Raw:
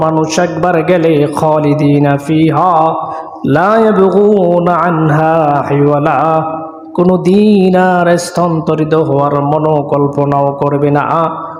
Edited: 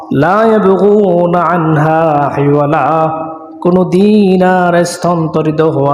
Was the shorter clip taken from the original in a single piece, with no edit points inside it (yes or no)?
yes